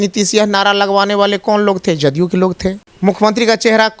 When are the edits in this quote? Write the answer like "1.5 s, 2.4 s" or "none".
2.9 s